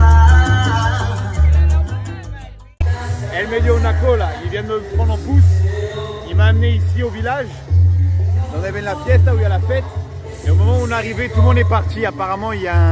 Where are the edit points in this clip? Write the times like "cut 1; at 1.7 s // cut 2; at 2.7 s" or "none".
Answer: cut 1; at 2.8 s